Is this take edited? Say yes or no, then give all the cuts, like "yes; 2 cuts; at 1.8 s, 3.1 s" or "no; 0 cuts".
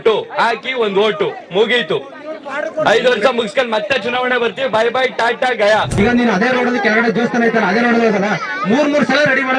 yes; 1 cut; at 6.0 s